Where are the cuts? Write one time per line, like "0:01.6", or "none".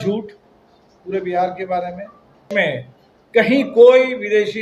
0:02.5